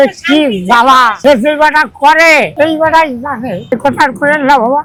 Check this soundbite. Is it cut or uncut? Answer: uncut